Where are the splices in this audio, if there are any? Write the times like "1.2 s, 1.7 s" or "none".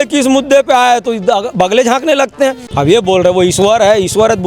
2.7 s